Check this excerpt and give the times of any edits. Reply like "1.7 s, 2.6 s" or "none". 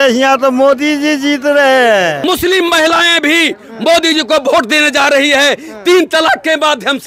2.2 s